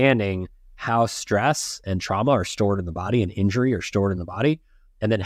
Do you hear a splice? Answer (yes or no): no